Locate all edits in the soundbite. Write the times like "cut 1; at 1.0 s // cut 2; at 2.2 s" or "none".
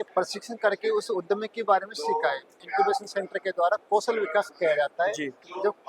cut 1; at 2.5 s